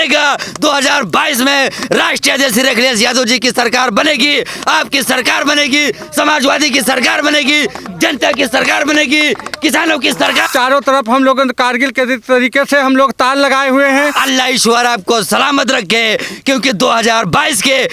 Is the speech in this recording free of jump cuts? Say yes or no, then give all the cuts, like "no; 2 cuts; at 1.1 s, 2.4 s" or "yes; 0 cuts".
no; 2 cuts; at 10.5 s, 14.2 s